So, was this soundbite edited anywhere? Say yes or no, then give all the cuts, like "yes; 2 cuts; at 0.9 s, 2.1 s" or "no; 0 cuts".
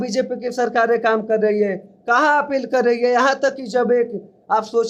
no; 0 cuts